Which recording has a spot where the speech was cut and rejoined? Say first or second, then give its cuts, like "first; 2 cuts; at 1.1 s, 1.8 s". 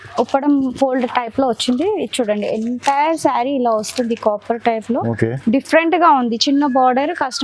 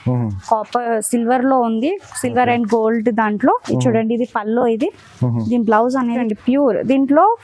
second; 1 cut; at 6.2 s